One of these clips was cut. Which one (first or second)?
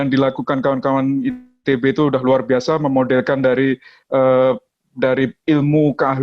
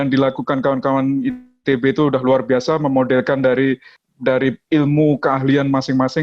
second